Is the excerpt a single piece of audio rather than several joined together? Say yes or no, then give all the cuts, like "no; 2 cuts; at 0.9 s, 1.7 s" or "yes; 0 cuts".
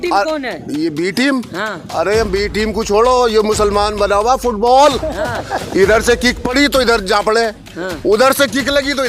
yes; 0 cuts